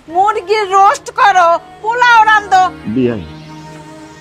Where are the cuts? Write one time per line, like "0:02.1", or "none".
0:02.8